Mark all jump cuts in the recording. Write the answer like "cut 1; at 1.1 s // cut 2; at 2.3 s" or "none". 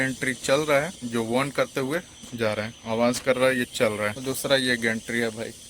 cut 1; at 1.0 s // cut 2; at 2.8 s // cut 3; at 4.2 s